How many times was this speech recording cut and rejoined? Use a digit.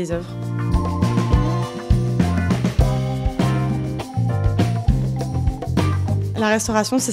0